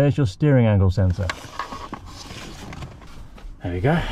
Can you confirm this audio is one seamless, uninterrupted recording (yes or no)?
yes